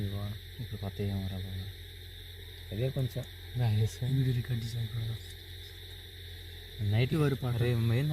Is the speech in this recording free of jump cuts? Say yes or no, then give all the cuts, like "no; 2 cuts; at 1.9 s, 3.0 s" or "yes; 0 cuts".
no; 1 cut; at 7.1 s